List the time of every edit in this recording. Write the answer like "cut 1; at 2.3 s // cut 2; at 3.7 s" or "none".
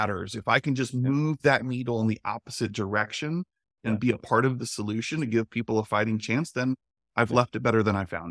none